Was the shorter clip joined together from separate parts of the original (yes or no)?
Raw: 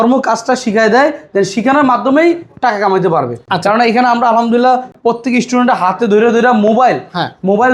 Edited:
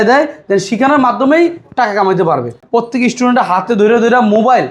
yes